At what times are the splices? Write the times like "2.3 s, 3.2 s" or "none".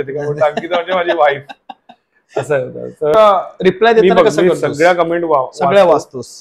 3.1 s